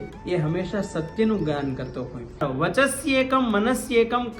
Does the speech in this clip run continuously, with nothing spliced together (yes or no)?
no